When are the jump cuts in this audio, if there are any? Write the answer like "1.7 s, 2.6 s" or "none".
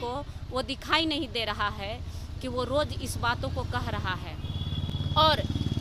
none